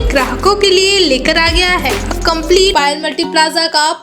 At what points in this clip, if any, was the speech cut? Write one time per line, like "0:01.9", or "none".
0:02.7